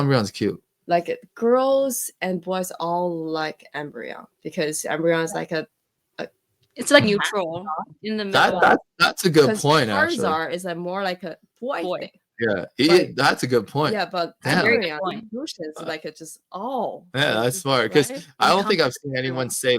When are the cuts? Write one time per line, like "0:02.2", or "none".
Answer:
0:07.0